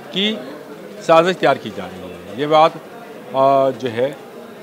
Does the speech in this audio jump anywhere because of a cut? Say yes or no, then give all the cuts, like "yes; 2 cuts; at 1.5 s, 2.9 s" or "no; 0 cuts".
no; 0 cuts